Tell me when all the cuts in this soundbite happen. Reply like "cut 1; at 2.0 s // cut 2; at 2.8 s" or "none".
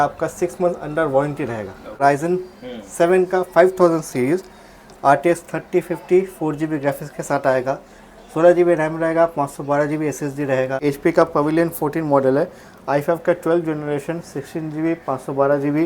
cut 1; at 2.0 s // cut 2; at 10.8 s